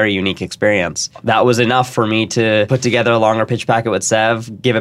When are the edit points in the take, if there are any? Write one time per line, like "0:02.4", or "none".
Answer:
0:01.1
0:02.7